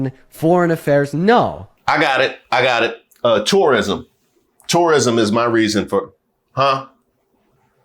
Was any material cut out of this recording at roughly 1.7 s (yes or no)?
yes